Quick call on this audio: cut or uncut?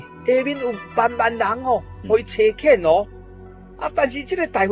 uncut